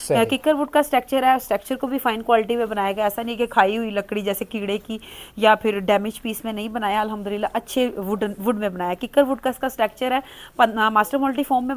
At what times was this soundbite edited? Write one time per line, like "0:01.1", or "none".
none